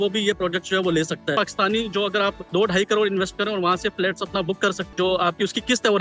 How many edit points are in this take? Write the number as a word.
three